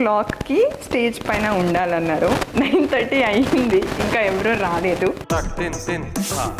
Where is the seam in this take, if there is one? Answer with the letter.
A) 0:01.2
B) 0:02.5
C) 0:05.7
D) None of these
D